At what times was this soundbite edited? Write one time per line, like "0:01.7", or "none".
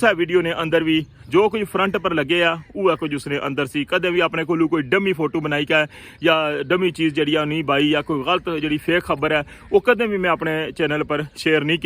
none